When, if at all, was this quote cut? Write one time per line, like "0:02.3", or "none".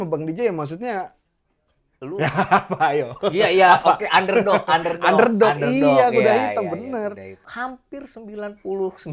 0:07.4

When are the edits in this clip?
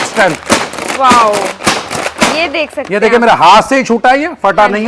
none

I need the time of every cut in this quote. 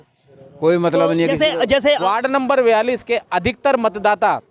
0:02.0

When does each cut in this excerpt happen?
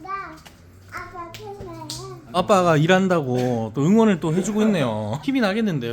0:02.3

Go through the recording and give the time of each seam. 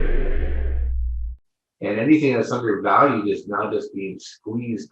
0:01.2

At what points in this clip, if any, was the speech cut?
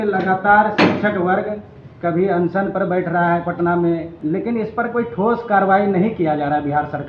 0:04.1

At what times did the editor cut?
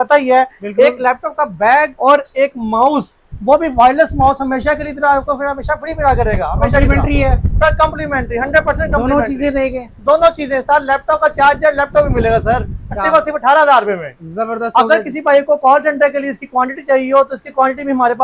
none

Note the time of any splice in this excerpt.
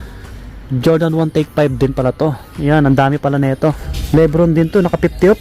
0:03.9

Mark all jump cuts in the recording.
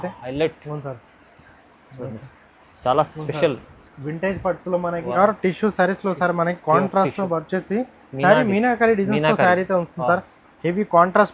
0:05.2

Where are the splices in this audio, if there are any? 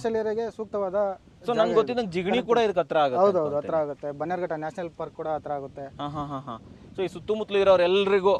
none

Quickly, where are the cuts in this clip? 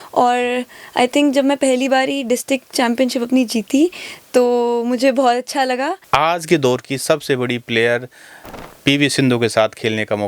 0:06.0

